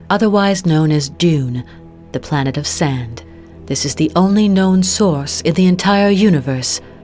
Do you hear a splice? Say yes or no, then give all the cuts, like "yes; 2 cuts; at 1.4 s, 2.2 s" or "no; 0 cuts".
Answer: no; 0 cuts